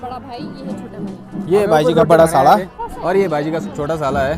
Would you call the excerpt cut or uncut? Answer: cut